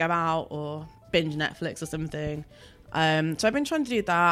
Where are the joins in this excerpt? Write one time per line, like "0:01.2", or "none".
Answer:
0:00.9